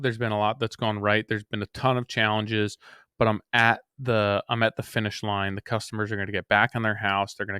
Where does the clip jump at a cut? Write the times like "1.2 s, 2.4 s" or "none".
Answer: none